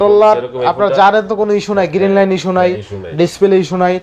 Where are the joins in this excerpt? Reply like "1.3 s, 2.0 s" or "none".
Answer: none

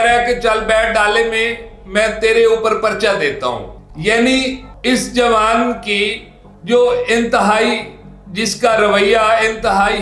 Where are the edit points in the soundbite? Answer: none

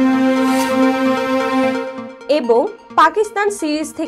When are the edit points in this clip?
none

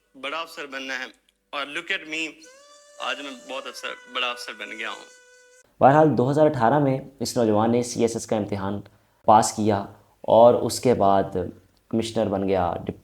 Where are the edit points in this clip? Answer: 5.6 s, 9.2 s

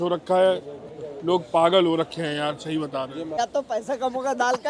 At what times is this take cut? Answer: 3.4 s

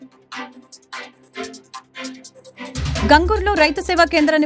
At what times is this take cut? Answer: 3.0 s

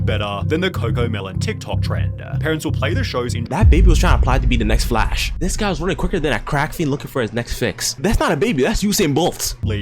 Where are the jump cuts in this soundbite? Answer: none

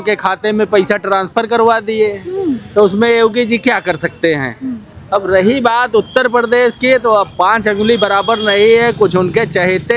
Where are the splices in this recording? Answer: none

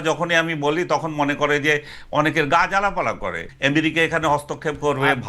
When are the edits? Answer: 3.4 s

